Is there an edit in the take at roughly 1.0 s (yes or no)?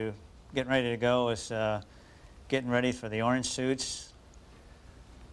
no